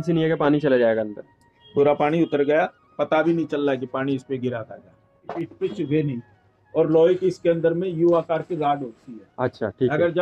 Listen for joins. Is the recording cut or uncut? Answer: cut